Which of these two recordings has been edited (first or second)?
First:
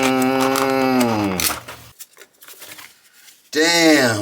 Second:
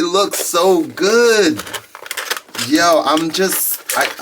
first